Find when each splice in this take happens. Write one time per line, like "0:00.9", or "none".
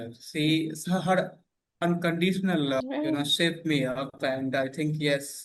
0:02.8

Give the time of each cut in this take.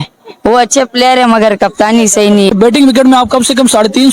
0:02.5

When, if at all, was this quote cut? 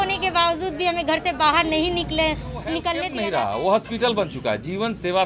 0:03.1

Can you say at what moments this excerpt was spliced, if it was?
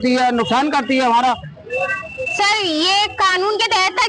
none

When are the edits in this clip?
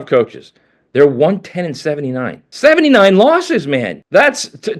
0:02.4
0:04.0

